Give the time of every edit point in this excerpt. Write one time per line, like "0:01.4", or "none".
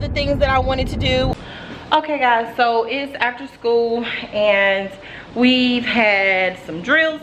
0:01.3